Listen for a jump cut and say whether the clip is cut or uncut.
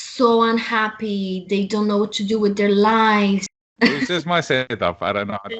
cut